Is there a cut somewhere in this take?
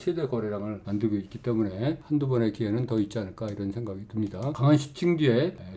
yes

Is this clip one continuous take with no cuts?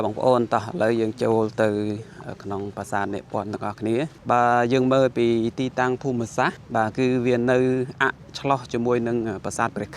no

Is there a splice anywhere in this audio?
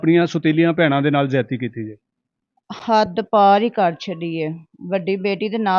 no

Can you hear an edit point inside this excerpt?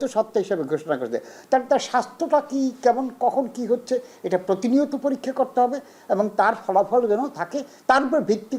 no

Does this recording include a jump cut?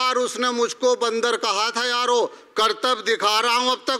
no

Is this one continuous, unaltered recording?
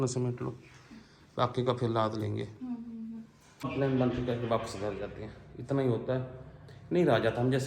no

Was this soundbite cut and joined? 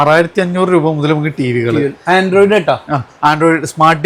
no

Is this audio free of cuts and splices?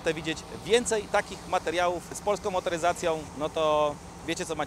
no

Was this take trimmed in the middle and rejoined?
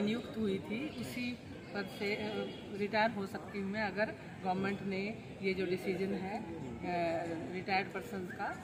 no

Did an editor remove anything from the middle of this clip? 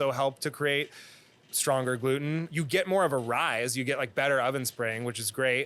yes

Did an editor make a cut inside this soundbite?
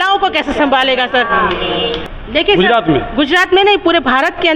yes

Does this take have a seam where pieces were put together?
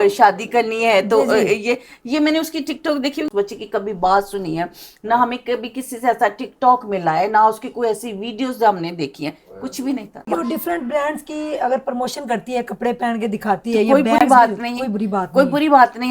yes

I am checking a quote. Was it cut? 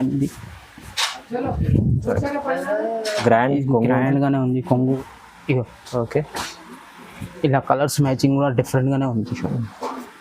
yes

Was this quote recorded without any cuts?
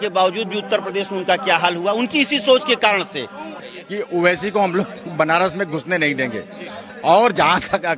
no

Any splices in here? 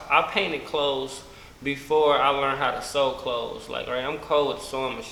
no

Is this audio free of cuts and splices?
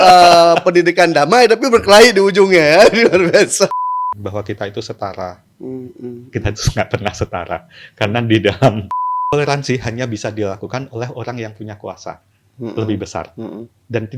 no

